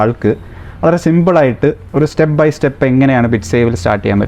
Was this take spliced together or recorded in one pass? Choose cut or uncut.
uncut